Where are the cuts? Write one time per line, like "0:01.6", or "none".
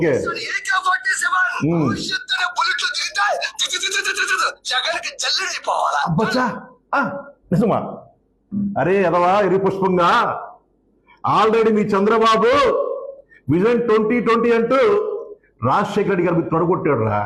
none